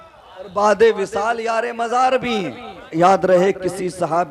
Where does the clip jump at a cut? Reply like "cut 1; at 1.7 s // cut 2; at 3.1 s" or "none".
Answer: cut 1; at 2.9 s